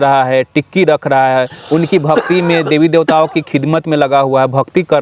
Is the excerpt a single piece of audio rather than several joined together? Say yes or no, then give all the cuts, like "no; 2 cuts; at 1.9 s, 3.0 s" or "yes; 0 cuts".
yes; 0 cuts